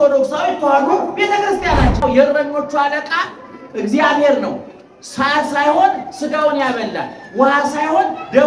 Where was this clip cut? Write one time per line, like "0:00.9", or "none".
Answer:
0:02.0